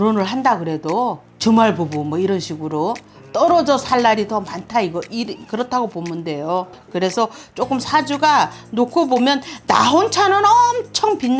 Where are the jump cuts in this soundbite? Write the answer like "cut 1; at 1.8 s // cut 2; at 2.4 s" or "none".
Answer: cut 1; at 1.3 s // cut 2; at 6.8 s

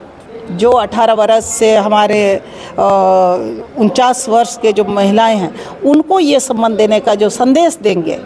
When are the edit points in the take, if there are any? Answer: none

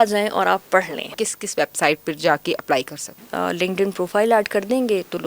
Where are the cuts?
cut 1; at 1.0 s // cut 2; at 3.2 s

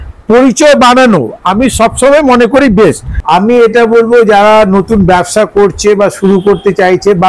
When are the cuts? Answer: cut 1; at 3.1 s

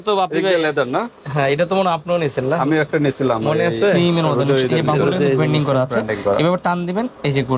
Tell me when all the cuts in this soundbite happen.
cut 1; at 5.4 s

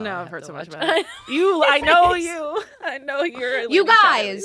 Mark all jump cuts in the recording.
none

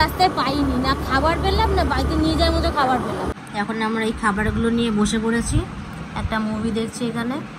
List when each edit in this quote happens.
cut 1; at 3.3 s

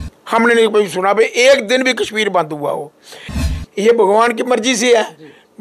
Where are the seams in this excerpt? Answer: cut 1; at 3.3 s

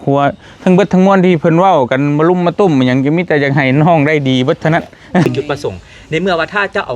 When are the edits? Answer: cut 1; at 5.3 s

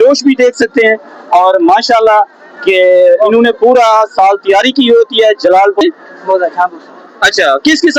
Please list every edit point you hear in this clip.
cut 1; at 5.8 s

